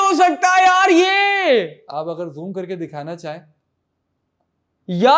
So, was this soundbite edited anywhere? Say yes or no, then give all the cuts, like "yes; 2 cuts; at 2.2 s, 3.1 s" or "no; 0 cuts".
no; 0 cuts